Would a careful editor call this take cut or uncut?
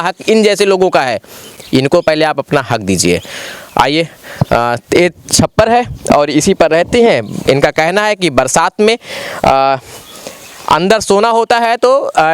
uncut